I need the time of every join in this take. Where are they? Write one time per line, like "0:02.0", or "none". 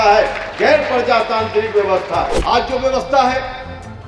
0:02.4